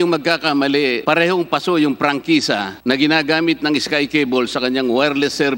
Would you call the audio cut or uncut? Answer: cut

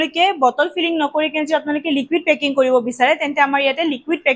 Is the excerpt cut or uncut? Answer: uncut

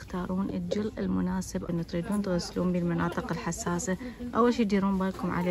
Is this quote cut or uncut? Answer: cut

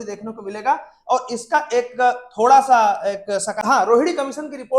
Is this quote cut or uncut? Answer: cut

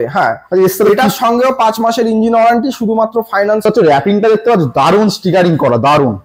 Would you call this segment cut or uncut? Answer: cut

